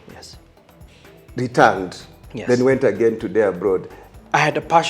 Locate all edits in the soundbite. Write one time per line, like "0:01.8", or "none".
0:04.0